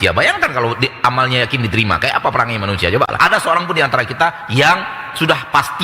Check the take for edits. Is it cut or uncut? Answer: cut